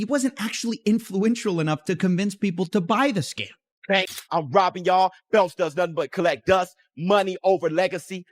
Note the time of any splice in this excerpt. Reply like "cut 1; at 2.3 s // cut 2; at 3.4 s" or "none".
cut 1; at 3.9 s

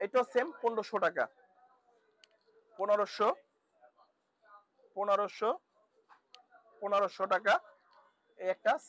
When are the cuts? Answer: none

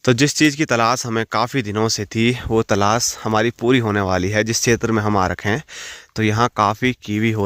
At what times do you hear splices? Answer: none

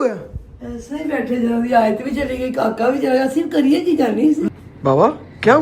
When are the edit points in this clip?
cut 1; at 4.5 s

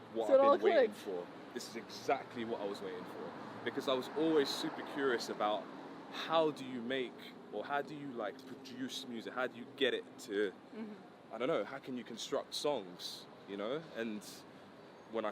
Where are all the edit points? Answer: none

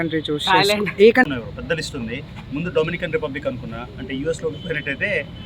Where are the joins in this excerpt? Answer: cut 1; at 1.3 s

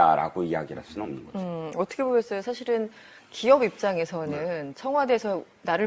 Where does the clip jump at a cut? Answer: cut 1; at 2.6 s

